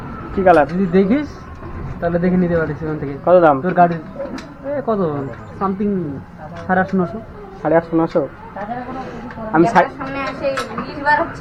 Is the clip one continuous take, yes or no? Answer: yes